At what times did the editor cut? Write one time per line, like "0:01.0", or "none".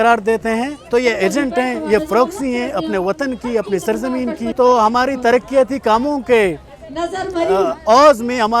0:04.5